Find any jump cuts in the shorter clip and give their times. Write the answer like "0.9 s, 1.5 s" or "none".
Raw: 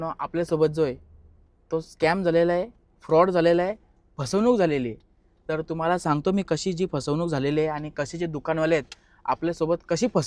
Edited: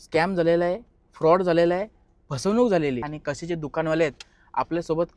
3.1 s

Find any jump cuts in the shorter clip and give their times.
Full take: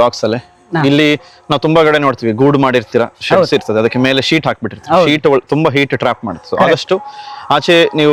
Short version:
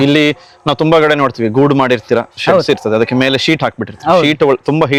none

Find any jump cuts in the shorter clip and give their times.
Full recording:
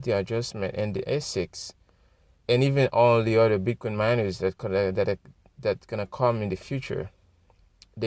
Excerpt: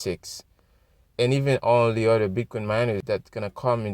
3.0 s

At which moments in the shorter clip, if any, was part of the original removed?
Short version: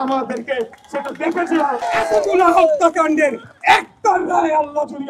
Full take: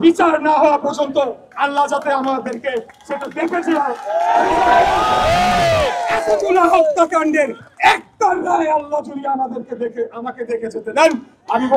1.8 s

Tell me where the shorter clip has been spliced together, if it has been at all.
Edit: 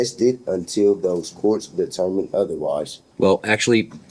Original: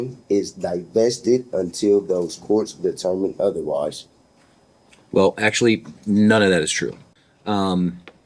3.0 s

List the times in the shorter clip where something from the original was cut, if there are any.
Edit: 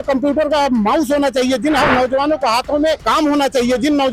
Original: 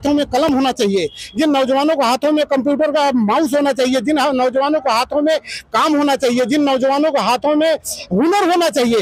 3.0 s

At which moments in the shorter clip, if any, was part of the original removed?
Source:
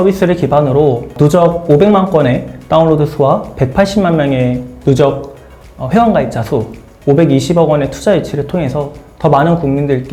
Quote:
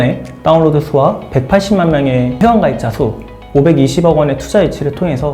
2.3 s

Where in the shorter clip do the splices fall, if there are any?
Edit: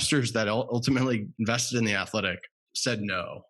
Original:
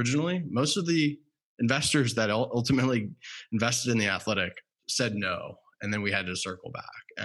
1.3 s

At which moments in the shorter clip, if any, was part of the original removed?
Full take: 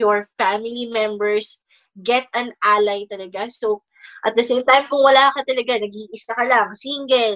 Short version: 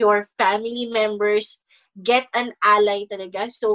none

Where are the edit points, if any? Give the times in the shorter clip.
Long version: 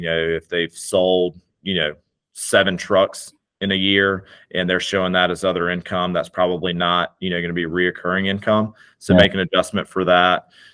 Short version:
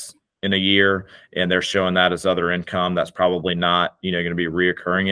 none

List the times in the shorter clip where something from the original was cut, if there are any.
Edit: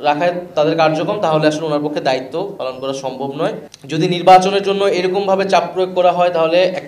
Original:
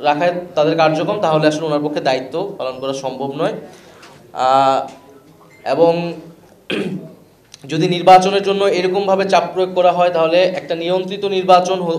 3.7 s

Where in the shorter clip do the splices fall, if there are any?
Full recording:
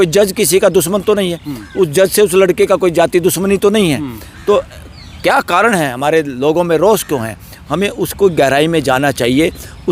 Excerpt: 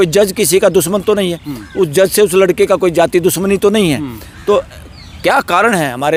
none

